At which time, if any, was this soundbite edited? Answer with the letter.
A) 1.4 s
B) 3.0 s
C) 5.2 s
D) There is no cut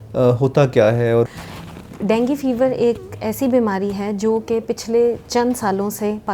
A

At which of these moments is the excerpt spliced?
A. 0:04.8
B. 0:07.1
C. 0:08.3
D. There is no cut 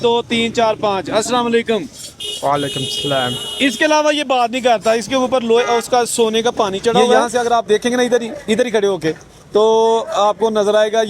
B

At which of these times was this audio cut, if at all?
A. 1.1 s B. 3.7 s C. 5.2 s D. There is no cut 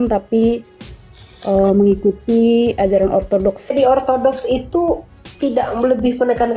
B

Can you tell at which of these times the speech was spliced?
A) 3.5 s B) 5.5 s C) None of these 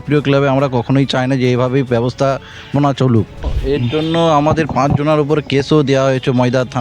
A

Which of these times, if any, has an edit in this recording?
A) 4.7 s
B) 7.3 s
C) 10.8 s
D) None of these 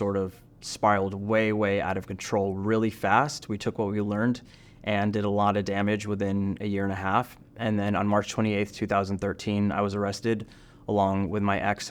D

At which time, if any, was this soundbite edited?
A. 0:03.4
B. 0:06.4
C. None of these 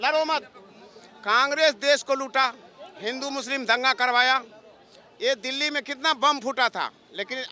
C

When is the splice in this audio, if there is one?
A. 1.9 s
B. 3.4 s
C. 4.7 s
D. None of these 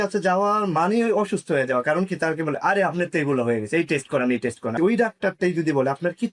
C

